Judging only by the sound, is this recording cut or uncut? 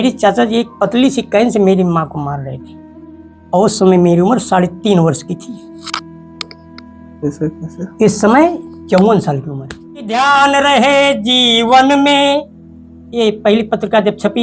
cut